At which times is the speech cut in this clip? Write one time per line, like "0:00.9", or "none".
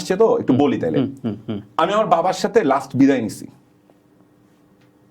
none